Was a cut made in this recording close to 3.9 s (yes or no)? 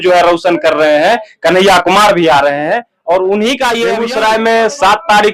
yes